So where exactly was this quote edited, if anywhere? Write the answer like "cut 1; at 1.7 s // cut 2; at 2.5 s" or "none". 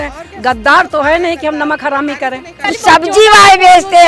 cut 1; at 2.7 s

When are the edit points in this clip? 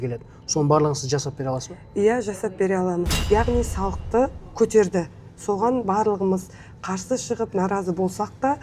cut 1; at 3.2 s

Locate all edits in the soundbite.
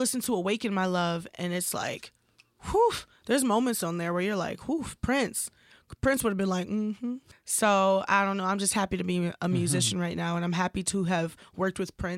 cut 1; at 7.2 s

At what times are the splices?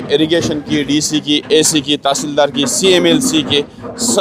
none

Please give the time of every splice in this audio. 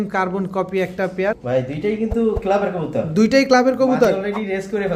none

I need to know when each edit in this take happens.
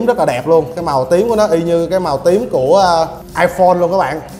cut 1; at 3.2 s

